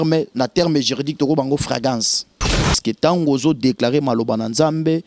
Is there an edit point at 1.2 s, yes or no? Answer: no